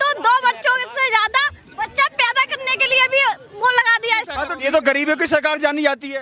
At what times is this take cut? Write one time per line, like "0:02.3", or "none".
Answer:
0:04.4